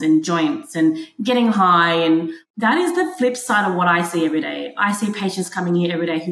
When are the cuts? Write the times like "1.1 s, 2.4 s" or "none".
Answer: 2.4 s